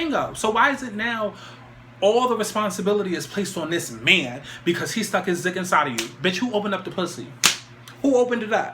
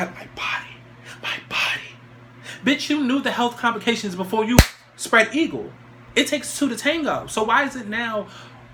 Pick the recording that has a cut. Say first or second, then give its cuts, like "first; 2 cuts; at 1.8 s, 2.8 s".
first; 1 cut; at 7.5 s